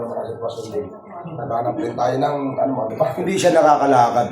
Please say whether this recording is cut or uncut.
cut